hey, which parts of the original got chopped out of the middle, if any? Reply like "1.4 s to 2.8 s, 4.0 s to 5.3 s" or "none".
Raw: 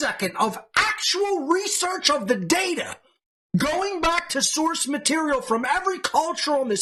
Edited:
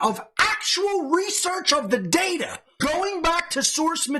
3.2 s to 3.6 s